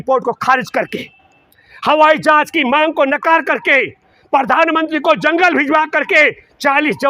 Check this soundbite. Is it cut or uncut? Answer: uncut